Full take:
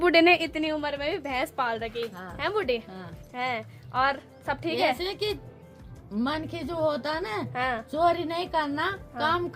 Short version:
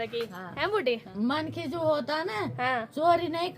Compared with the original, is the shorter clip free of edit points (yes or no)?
no